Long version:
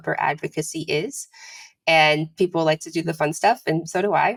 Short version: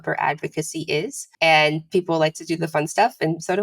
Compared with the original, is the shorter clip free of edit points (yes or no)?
no